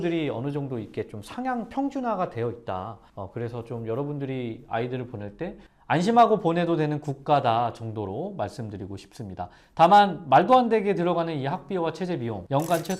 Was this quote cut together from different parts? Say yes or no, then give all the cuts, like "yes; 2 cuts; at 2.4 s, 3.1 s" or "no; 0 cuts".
no; 0 cuts